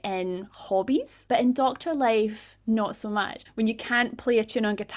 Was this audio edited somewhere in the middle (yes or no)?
yes